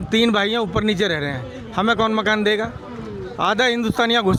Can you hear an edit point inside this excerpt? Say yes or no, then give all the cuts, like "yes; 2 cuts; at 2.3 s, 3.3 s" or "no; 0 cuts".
no; 0 cuts